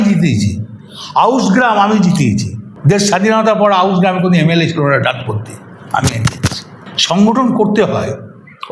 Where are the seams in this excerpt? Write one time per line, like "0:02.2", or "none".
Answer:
none